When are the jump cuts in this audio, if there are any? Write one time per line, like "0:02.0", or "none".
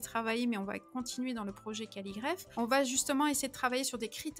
0:02.5